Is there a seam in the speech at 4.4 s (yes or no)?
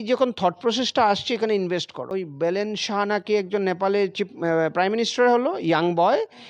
no